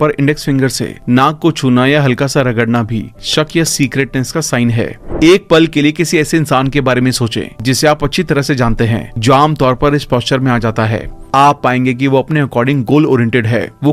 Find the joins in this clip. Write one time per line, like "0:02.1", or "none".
0:05.0